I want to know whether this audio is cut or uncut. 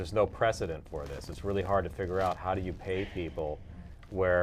uncut